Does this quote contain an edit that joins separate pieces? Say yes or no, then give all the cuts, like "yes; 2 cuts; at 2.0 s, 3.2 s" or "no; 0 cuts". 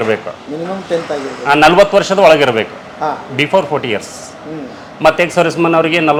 no; 0 cuts